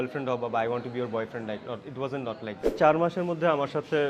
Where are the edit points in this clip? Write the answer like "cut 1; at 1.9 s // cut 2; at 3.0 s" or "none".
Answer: cut 1; at 2.8 s